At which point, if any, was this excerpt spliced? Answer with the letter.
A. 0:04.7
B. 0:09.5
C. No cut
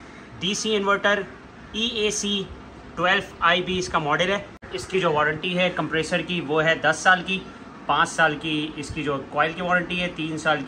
A